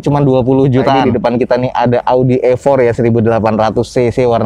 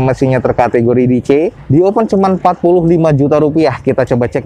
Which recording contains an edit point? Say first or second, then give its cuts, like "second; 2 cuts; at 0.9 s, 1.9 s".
first; 1 cut; at 1.0 s